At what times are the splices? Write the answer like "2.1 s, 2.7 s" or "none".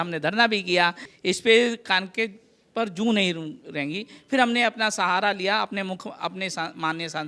1.1 s